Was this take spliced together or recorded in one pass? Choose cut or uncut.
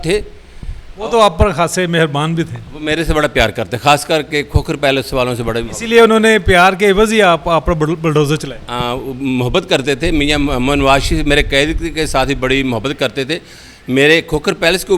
uncut